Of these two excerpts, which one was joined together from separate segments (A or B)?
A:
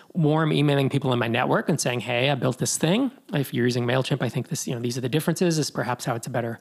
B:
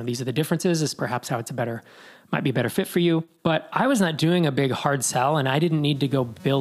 B